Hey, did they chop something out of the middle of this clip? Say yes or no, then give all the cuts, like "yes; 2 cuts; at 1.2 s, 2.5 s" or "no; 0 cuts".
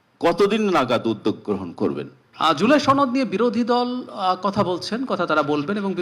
yes; 1 cut; at 2.2 s